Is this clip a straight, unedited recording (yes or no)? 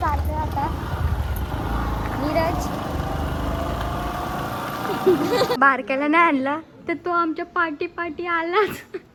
yes